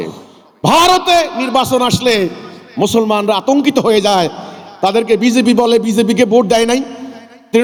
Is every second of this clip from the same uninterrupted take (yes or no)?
yes